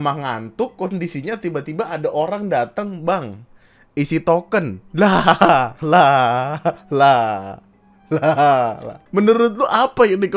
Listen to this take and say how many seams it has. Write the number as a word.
one